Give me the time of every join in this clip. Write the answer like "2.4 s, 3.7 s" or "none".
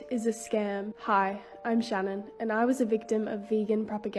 none